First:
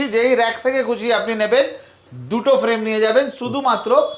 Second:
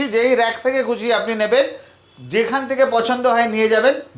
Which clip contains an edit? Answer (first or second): first